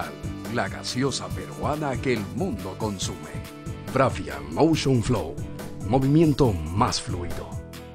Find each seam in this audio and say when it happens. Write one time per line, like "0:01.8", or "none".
0:03.3

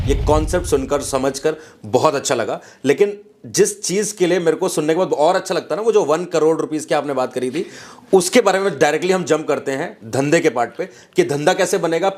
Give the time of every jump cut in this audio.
none

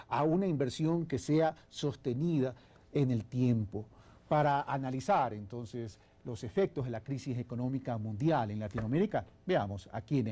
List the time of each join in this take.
0:04.9

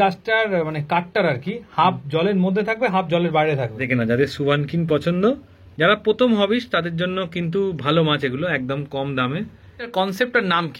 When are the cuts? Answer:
0:03.8
0:09.9

